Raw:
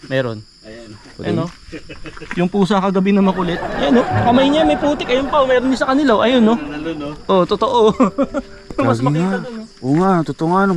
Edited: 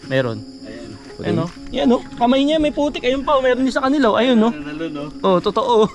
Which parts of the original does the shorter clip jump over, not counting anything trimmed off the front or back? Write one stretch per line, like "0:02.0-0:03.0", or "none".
0:01.6-0:03.7

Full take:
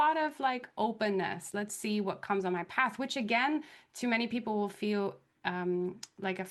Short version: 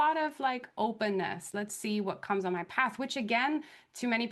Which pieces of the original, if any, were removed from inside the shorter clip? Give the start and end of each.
none

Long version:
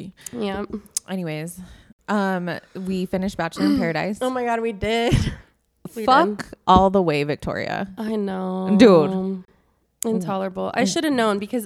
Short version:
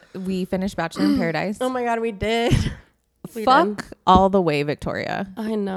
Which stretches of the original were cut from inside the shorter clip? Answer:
none

